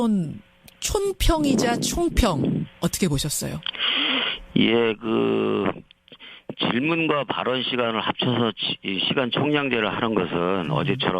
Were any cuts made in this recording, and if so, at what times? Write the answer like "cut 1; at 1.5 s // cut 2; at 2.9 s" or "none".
cut 1; at 3.2 s